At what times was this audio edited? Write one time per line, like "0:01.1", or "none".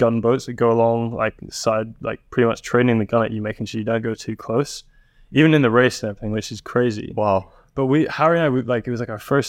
none

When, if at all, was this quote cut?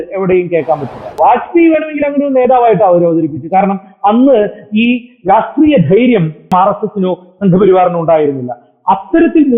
0:01.0
0:06.5

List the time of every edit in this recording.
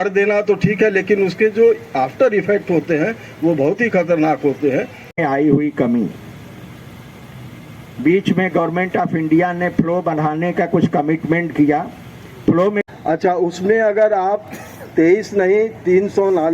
0:05.1
0:12.8

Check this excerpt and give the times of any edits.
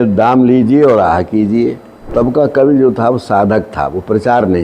0:02.0

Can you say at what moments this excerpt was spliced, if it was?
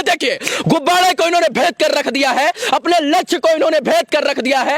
none

